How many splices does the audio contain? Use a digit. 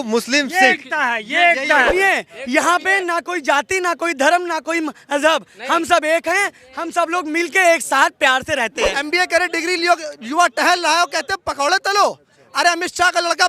2